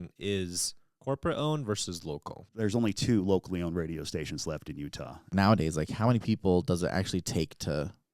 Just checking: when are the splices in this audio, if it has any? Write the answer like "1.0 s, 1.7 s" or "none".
2.4 s, 5.2 s